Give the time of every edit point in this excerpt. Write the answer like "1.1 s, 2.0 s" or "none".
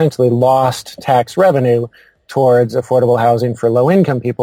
none